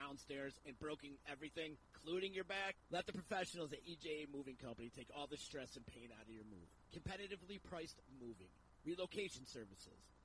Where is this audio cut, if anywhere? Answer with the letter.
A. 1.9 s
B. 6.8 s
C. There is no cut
A